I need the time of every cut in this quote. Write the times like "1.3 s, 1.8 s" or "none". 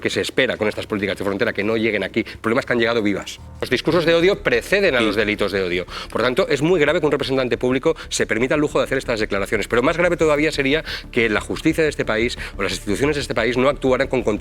3.7 s